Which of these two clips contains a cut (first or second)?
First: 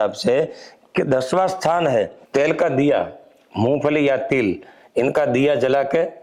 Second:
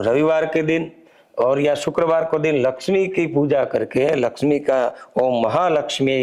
first